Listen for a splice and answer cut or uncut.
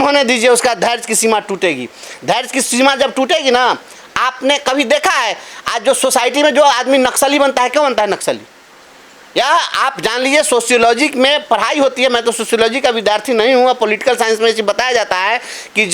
uncut